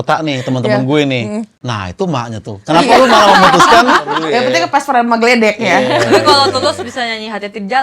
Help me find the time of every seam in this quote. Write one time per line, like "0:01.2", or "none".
0:01.6
0:04.2